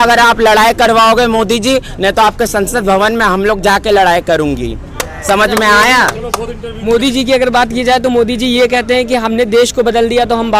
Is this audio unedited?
yes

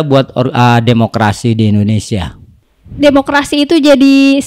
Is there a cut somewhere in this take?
no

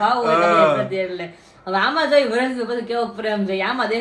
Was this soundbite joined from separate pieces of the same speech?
no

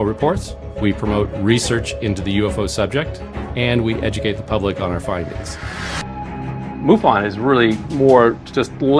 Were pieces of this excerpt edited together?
yes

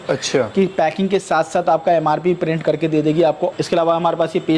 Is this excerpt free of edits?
no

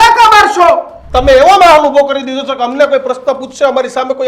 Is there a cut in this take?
yes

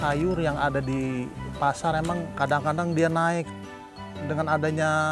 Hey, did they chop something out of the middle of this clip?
yes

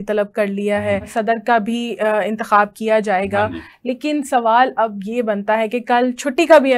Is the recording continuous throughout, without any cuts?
no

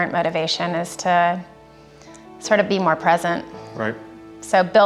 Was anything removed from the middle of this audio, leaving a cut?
no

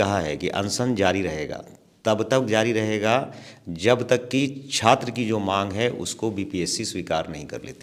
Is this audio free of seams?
yes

